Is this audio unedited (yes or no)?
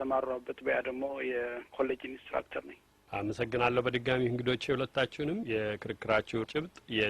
yes